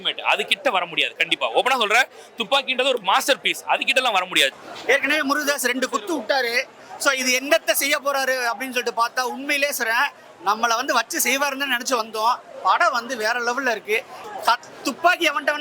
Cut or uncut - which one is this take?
cut